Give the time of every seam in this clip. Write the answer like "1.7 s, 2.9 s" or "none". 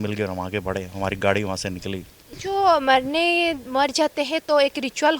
2.3 s

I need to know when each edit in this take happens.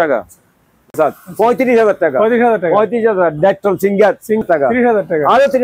1.0 s, 4.4 s

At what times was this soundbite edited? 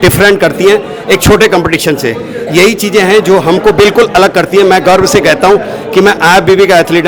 none

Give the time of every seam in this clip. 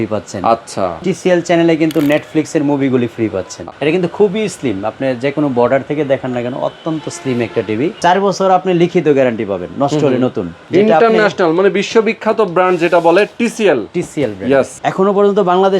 1.0 s, 3.5 s, 8.0 s, 10.6 s, 14.8 s

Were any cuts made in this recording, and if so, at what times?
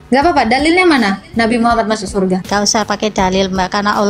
2.4 s

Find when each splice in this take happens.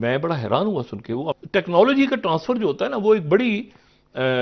1.3 s

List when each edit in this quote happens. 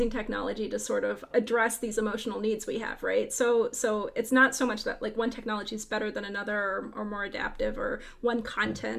1.2 s

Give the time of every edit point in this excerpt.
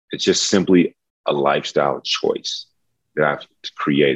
none

